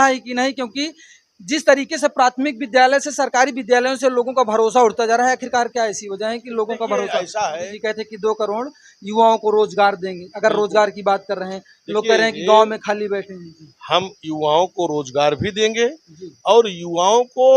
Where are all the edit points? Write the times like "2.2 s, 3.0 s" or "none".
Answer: 7.7 s